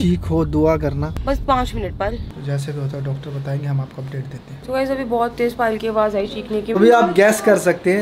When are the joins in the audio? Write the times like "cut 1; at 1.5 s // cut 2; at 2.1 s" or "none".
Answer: cut 1; at 1.2 s // cut 2; at 2.2 s // cut 3; at 4.6 s // cut 4; at 6.7 s